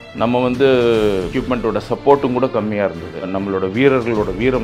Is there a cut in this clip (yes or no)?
yes